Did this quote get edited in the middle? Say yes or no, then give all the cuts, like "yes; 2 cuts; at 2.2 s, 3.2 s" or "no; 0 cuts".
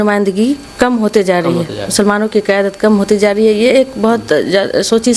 no; 0 cuts